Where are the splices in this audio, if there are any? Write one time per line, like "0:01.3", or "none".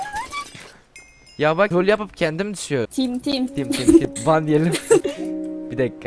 0:01.7
0:03.1
0:04.1
0:05.0